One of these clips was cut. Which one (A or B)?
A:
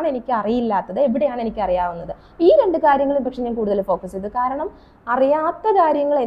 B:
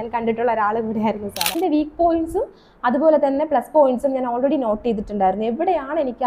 B